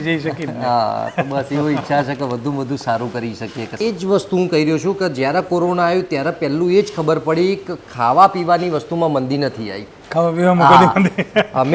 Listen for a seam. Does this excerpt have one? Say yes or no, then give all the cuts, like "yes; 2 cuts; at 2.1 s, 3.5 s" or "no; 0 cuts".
yes; 1 cut; at 3.8 s